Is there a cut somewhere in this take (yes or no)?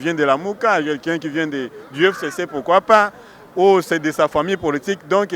no